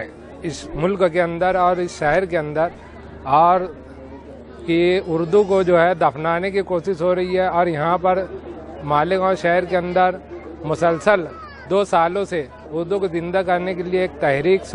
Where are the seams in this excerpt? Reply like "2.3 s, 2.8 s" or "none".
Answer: none